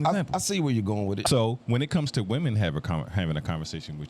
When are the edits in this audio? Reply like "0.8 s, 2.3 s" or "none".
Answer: 1.2 s